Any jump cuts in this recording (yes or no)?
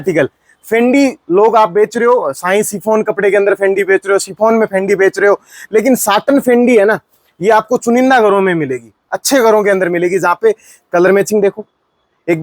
no